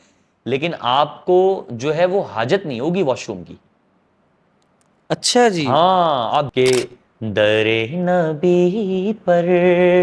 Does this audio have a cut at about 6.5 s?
yes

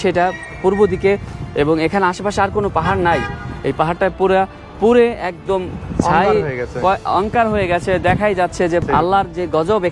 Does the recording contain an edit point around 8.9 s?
yes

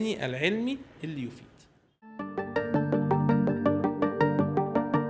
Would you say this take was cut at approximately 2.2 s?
yes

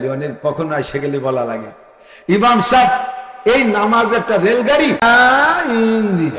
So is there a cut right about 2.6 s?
no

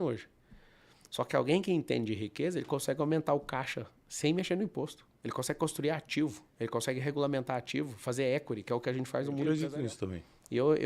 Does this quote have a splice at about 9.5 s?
yes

